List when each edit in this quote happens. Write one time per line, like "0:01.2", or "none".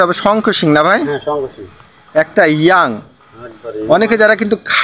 none

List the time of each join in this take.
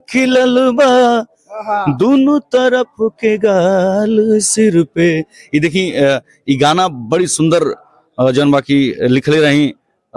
none

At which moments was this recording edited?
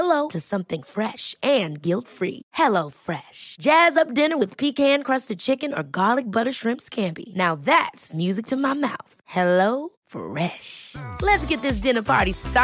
none

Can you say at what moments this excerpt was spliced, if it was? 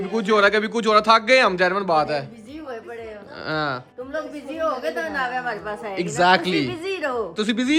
none

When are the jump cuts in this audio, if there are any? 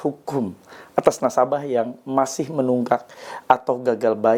none

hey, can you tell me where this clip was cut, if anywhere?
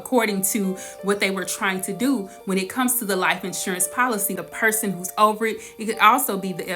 0:04.5

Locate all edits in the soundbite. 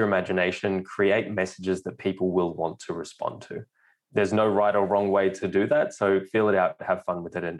0:04.4
0:05.4

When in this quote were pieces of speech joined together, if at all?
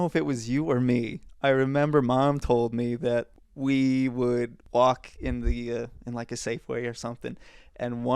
0:01.2
0:03.4
0:04.6

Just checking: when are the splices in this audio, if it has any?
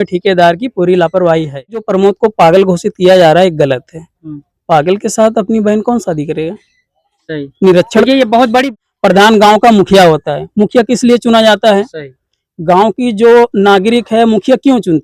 0:01.9
0:08.7

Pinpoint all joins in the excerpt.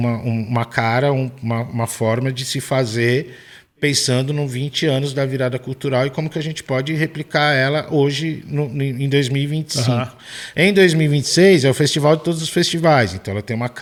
none

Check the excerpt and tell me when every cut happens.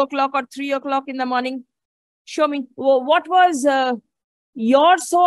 0:02.7

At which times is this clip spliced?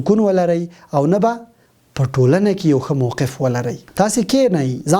0:03.8

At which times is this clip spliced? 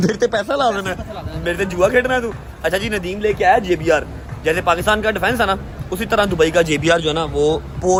none

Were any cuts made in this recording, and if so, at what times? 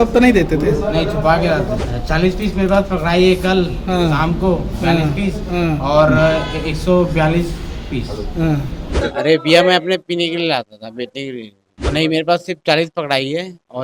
0:01.9
0:09.0
0:11.8

